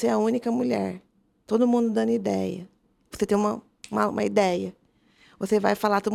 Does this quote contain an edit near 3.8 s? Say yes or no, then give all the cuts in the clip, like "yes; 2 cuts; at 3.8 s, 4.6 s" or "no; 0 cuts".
no; 0 cuts